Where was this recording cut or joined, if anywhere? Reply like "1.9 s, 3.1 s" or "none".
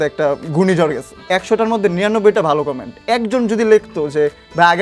1.1 s